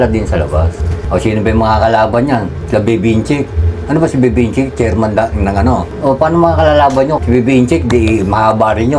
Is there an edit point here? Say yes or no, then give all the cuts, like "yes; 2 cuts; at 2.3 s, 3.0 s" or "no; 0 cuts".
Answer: yes; 3 cuts; at 0.9 s, 5.9 s, 7.2 s